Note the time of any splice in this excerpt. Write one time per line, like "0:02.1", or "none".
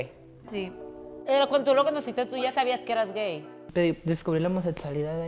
0:01.1
0:03.6